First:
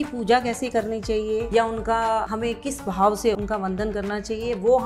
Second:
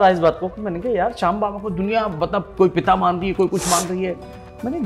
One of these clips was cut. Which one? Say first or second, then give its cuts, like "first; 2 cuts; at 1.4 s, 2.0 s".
first; 3 cuts; at 1.5 s, 2.3 s, 3.4 s